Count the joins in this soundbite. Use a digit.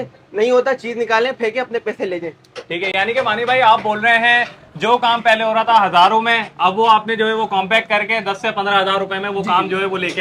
0